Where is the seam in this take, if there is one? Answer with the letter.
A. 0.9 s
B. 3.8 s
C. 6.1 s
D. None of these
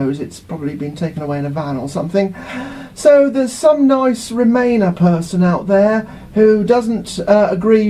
B